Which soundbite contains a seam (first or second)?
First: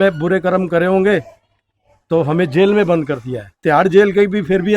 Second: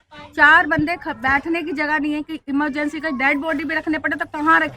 first